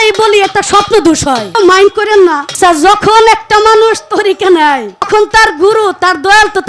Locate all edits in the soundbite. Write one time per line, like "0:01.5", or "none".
0:01.6
0:02.5
0:05.1